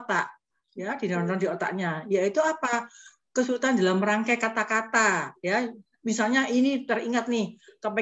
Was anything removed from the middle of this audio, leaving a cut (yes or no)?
no